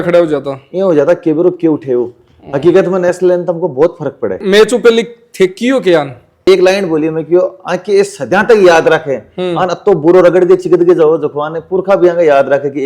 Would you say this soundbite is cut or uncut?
cut